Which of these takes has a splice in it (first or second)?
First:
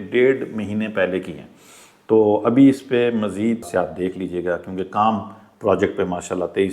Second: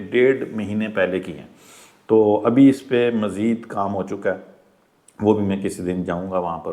first